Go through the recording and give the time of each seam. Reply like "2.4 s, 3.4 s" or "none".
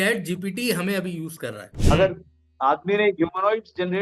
1.7 s